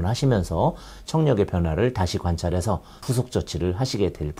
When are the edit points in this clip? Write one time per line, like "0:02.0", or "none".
0:03.0